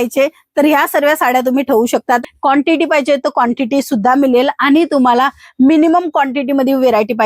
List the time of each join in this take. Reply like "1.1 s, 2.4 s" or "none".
2.2 s